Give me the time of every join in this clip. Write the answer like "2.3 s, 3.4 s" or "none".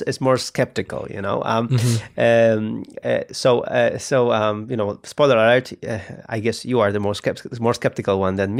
none